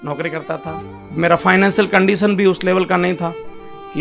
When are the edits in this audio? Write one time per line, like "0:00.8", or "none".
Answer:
0:01.0